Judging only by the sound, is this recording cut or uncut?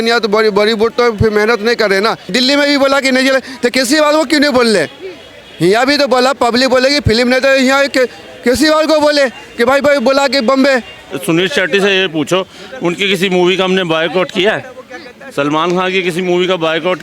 cut